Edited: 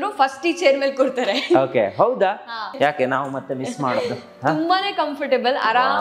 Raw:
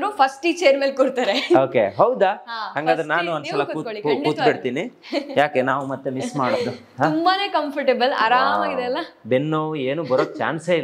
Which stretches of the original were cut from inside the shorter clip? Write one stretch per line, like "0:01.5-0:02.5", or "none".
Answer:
0:02.7-0:05.3

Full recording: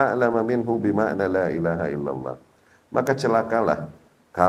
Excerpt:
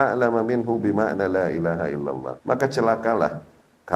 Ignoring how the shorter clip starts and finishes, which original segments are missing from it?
0:02.3-0:02.8

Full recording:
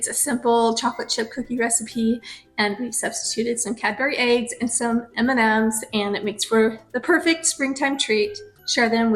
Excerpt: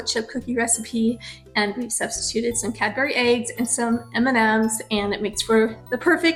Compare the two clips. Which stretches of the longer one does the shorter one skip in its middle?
none

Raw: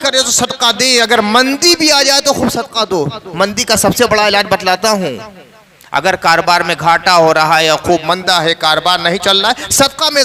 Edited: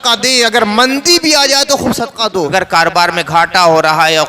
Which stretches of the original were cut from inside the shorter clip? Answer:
0:03.1-0:06.0

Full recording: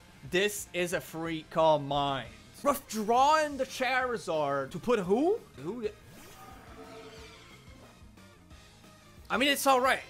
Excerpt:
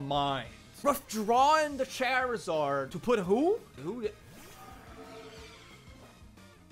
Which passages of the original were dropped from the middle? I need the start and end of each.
none

